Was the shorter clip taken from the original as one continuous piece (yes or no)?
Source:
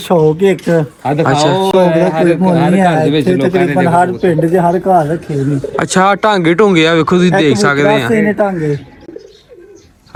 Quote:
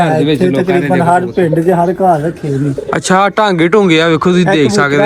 yes